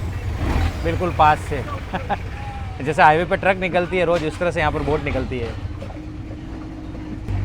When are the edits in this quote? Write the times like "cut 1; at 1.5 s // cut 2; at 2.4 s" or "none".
none